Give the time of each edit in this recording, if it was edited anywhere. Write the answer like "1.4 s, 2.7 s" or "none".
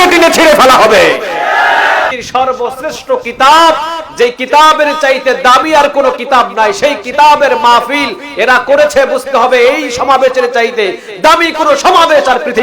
2.1 s